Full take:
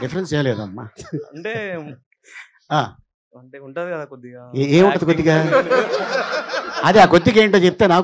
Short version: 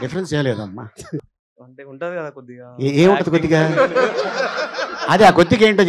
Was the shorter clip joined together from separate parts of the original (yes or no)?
yes